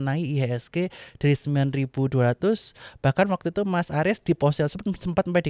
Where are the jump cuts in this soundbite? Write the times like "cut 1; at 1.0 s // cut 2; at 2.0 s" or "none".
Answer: none